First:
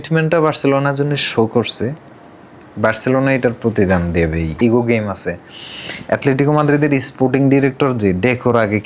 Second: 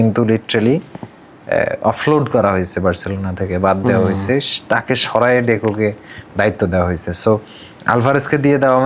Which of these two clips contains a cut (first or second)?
first